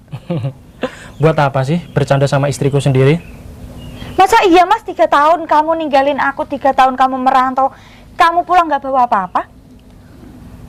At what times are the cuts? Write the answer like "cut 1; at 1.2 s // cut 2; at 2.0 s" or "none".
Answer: none